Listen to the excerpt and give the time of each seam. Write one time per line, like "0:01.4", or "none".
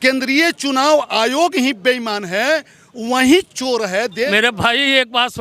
0:04.3